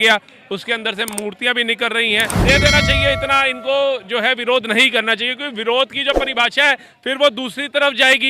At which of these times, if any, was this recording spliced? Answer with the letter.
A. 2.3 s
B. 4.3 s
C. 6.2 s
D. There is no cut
A